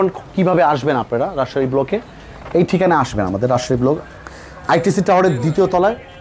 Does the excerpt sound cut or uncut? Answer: uncut